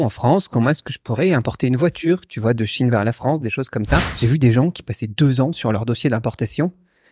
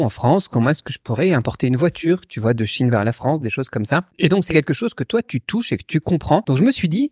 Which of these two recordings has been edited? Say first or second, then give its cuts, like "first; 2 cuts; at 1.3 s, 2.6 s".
first; 1 cut; at 4.1 s